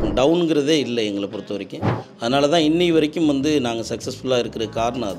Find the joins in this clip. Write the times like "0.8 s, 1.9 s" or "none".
none